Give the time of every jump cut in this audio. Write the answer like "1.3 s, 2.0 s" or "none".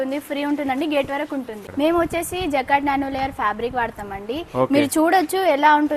1.6 s